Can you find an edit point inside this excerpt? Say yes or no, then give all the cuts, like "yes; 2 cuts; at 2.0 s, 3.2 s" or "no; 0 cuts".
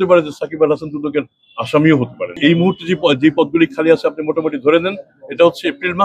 yes; 1 cut; at 2.2 s